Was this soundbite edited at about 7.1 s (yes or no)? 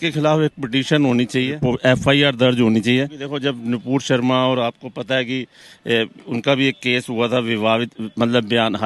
no